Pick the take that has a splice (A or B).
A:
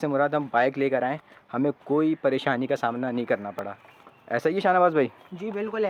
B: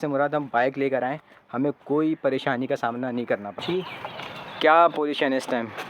B